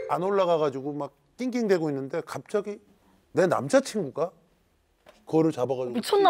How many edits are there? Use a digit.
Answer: 0